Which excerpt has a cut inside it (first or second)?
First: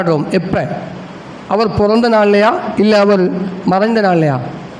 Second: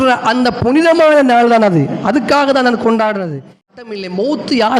second